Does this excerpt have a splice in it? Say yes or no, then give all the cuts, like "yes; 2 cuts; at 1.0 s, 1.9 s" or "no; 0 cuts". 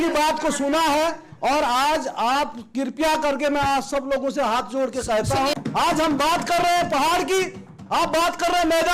yes; 1 cut; at 5.5 s